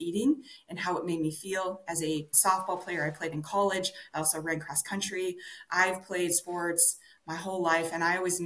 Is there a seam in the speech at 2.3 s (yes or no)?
yes